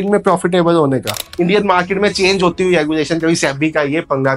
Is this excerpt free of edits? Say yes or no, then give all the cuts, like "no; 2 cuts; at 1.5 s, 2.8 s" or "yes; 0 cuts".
no; 1 cut; at 1.3 s